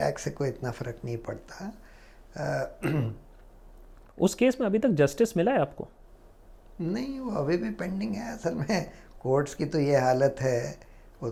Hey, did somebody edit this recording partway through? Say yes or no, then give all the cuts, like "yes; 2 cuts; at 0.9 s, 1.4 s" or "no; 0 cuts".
no; 0 cuts